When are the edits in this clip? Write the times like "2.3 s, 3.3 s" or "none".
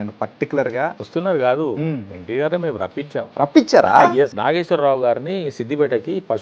1.0 s, 3.3 s, 4.4 s